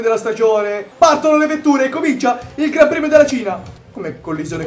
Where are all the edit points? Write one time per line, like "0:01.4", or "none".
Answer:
0:00.8
0:03.5